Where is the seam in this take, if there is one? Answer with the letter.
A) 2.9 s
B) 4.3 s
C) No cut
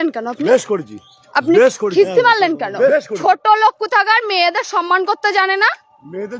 A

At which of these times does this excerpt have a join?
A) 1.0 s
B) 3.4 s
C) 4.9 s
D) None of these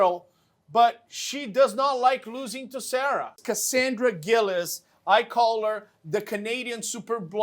B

